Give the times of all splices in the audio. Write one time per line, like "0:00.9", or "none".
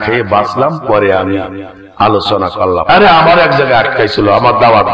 0:02.8